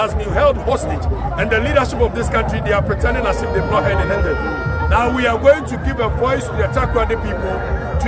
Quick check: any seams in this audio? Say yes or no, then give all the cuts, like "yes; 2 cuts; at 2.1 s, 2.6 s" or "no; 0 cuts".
no; 0 cuts